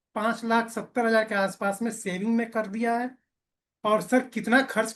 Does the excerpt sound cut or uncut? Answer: uncut